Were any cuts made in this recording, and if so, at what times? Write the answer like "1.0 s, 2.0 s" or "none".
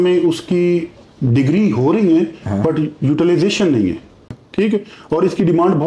4.0 s